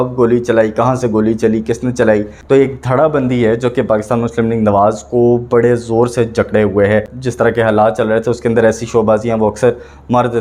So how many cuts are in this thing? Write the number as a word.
two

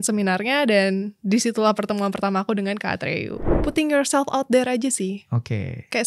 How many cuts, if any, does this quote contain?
one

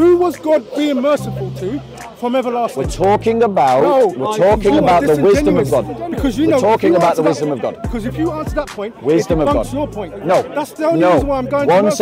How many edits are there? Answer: zero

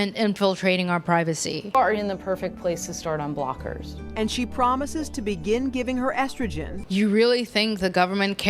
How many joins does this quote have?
two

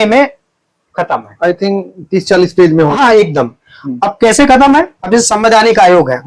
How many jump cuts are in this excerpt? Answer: zero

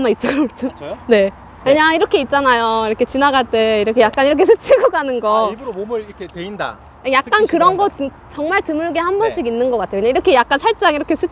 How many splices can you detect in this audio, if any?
one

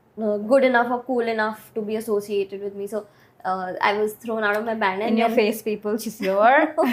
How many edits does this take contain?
zero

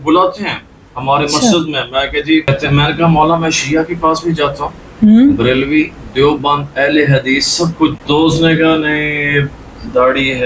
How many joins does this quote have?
two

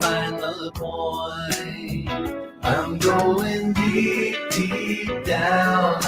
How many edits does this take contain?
one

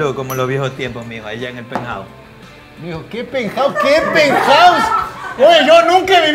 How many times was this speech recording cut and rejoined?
zero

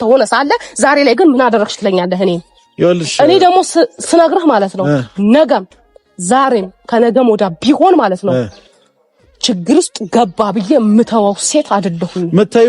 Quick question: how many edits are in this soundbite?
zero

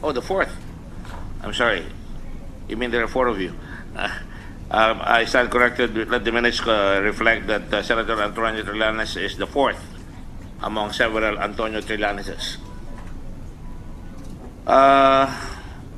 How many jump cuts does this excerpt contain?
one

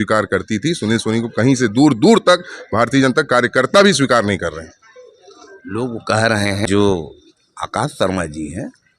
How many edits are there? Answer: one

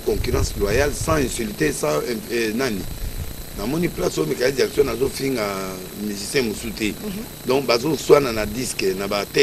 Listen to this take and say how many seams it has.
zero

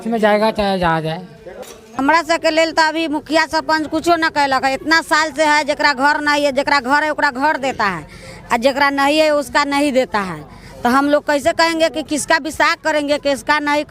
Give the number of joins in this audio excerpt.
one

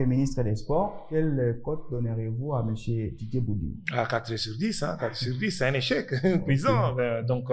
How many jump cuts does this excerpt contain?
zero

